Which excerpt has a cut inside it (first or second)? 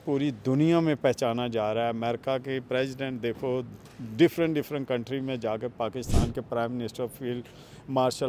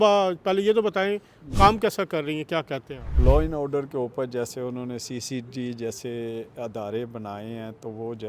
second